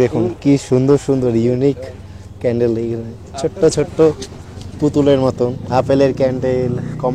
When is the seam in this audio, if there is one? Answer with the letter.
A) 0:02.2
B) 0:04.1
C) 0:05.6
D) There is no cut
C